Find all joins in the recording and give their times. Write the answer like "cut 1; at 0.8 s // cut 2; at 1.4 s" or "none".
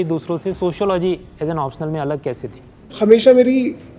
cut 1; at 2.9 s